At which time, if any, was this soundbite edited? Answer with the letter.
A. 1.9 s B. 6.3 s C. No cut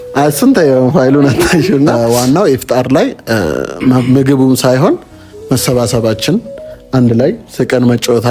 A